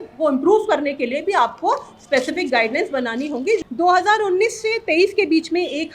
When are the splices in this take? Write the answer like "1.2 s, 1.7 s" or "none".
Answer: 3.6 s